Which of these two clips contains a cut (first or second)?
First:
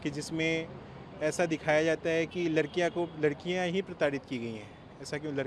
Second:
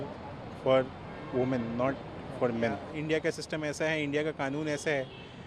second